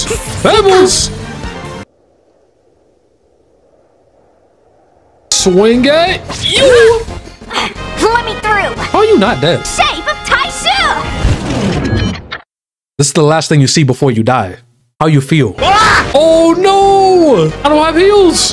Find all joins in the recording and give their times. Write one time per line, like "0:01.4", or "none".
0:05.3
0:16.1